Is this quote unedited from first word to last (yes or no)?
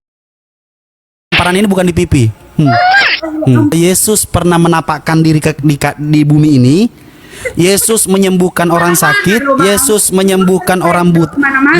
no